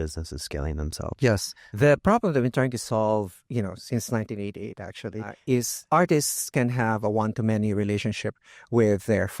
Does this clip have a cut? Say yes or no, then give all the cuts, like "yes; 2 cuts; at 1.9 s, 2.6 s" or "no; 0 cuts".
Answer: yes; 2 cuts; at 1.6 s, 5.6 s